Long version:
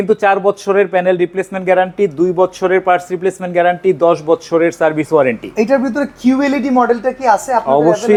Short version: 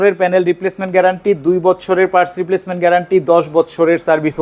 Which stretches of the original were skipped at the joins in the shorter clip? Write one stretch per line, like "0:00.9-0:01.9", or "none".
none

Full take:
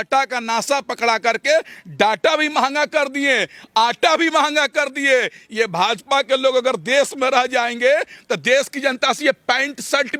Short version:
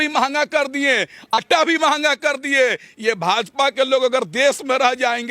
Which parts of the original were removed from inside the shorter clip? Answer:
0:03.8-0:03.9

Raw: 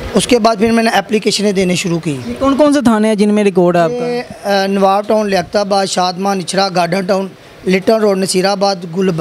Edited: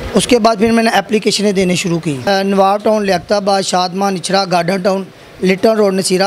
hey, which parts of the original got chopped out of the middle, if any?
0:02.2-0:04.4

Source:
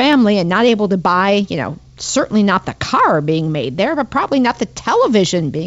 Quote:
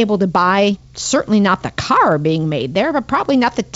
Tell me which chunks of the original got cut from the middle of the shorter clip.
0:01.6-0:01.9

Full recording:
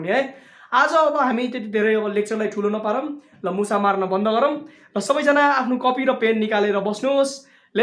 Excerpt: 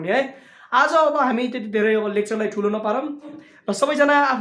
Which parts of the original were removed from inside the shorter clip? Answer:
0:03.4-0:04.7

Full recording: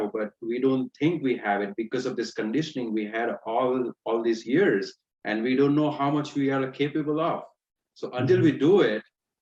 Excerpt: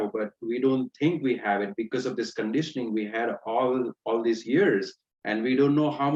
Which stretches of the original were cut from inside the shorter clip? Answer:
none

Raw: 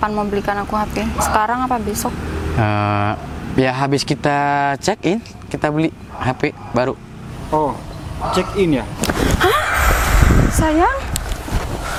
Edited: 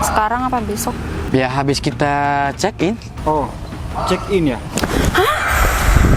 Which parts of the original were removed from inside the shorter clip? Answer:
0:02.3-0:03.4
0:05.3-0:07.4

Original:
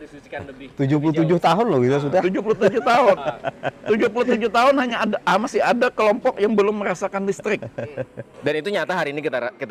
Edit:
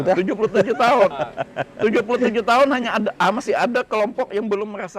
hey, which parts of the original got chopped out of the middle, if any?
none

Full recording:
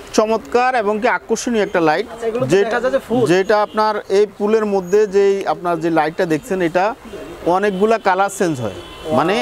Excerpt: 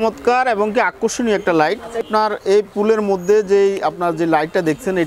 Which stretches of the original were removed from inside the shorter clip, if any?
0:02.3-0:03.7

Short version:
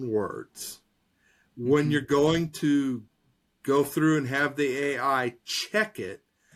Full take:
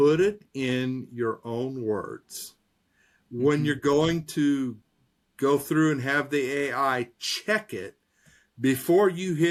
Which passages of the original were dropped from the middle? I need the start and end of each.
none

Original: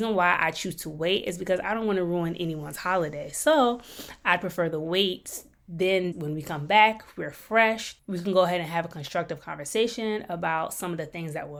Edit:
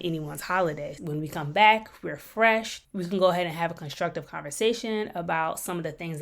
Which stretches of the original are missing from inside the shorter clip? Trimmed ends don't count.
0:03.4-0:06.2

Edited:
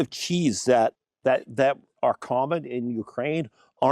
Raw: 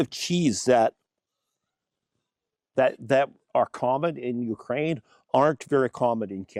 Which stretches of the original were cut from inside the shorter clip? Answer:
0:01.1-0:02.6

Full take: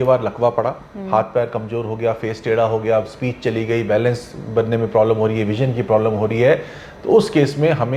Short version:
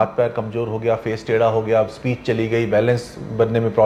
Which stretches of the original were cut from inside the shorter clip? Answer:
none

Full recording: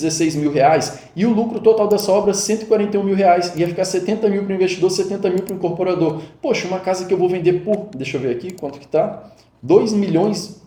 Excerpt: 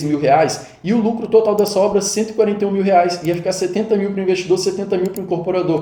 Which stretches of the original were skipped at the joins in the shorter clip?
none

